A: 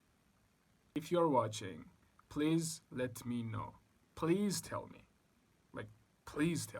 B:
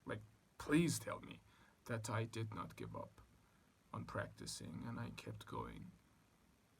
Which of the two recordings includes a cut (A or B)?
A